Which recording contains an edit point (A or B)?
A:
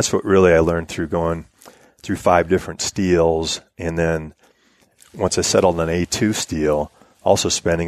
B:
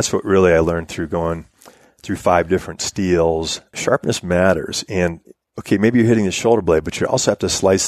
B